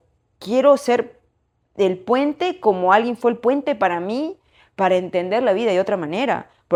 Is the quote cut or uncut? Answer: uncut